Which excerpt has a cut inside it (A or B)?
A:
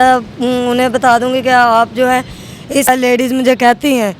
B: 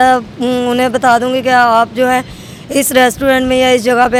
A